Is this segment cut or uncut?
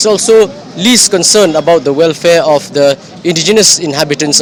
uncut